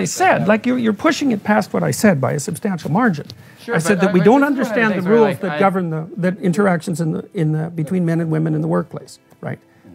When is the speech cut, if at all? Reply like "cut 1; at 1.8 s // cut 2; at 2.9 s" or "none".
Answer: none